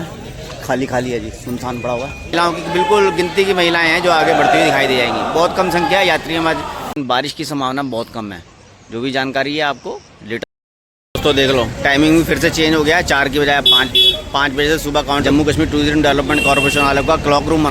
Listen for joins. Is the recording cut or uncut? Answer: cut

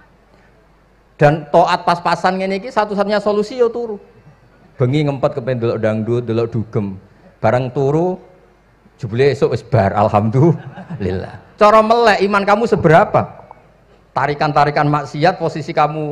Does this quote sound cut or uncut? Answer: uncut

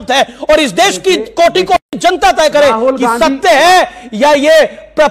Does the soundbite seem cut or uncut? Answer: uncut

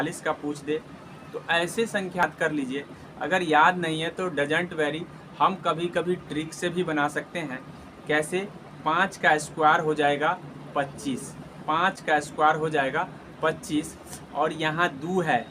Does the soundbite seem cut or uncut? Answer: cut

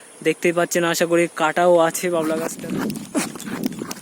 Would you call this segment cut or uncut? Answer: cut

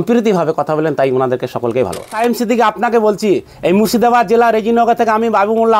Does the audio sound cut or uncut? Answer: cut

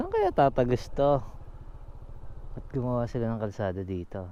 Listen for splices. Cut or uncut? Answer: uncut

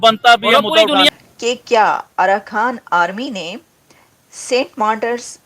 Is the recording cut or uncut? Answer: cut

